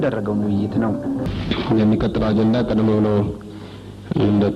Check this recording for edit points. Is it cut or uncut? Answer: cut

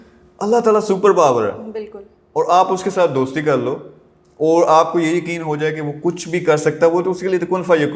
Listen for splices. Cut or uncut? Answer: uncut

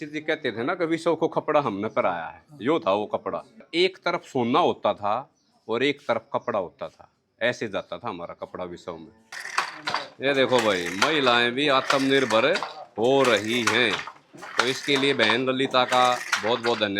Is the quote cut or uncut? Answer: cut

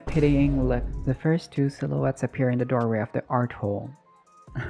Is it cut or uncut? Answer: cut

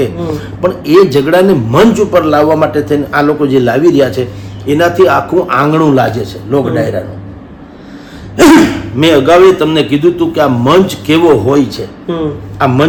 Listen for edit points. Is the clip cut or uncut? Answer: uncut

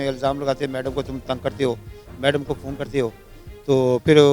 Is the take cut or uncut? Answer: uncut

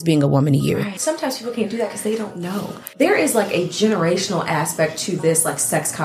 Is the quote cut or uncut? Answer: cut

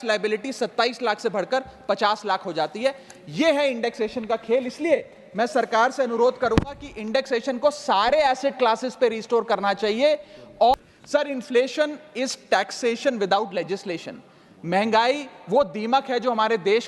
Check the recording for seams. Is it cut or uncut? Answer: cut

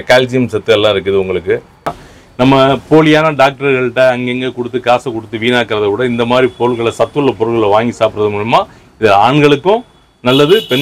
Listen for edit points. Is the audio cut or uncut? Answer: cut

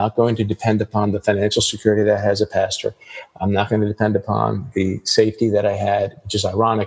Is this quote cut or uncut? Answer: uncut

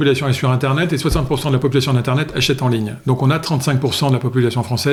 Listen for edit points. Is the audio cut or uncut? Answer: uncut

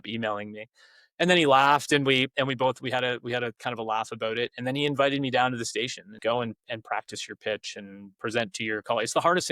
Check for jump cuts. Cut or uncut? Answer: cut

